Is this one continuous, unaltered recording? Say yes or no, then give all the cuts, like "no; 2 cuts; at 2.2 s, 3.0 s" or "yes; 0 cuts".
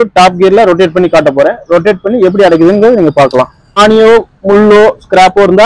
no; 1 cut; at 3.8 s